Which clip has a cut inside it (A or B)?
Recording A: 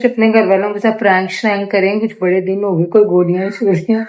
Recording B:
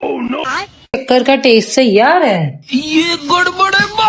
B